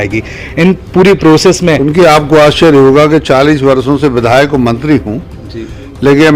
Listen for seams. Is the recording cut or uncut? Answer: cut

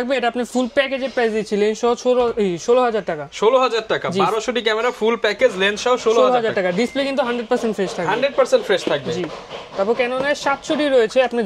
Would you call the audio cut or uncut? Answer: uncut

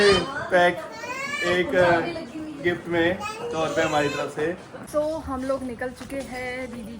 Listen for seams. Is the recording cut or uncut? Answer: cut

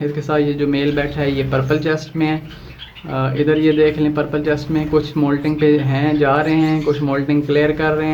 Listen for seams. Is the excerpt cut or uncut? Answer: uncut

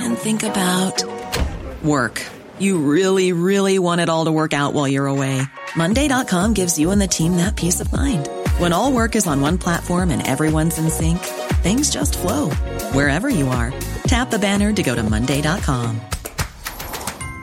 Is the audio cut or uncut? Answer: uncut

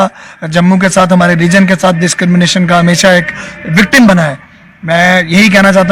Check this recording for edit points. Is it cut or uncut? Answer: uncut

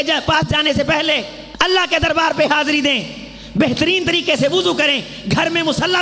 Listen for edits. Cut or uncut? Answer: cut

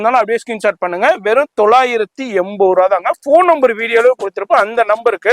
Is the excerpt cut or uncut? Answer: uncut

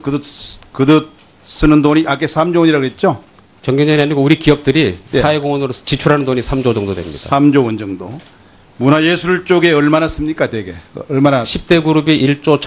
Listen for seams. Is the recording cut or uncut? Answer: uncut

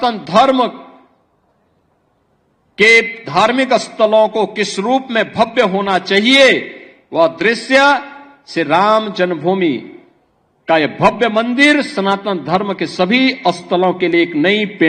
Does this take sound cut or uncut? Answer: uncut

